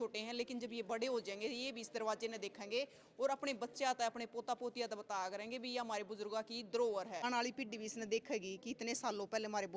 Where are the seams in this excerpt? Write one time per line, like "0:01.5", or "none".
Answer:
0:07.2